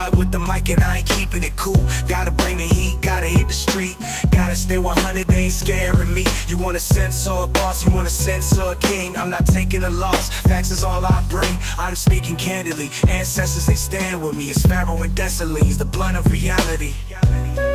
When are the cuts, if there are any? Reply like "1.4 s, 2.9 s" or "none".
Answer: none